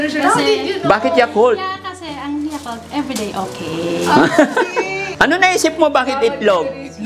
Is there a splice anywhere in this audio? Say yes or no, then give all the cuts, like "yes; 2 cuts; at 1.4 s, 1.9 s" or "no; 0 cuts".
yes; 1 cut; at 5.0 s